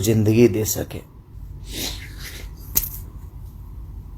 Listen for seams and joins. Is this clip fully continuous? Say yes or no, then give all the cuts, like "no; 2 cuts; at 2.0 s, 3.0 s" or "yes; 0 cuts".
no; 1 cut; at 1.3 s